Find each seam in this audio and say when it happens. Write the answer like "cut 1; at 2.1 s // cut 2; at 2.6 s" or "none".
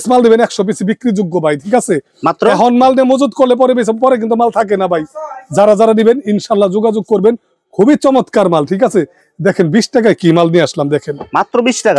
none